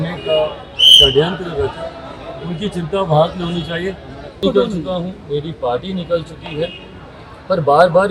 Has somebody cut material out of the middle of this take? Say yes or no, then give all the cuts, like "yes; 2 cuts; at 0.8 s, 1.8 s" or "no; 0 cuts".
yes; 1 cut; at 4.4 s